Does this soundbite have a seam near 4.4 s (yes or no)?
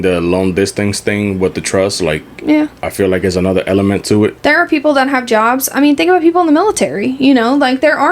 yes